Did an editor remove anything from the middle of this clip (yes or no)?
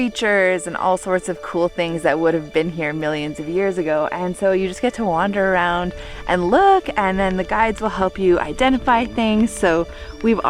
no